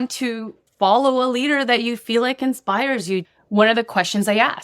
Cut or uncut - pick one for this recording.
cut